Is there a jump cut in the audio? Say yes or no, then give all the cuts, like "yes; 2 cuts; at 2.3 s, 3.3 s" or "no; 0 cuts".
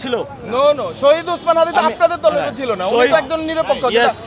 no; 0 cuts